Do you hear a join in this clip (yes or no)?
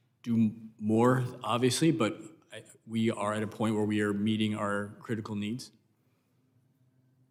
no